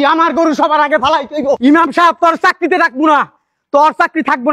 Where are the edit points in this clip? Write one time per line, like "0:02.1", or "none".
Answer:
0:01.6